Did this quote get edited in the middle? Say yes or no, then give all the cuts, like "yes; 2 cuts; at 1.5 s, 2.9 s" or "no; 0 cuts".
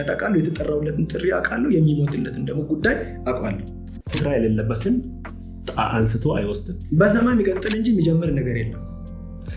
yes; 1 cut; at 4.1 s